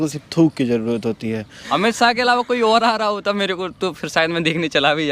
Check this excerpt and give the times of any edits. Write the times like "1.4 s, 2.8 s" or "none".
1.6 s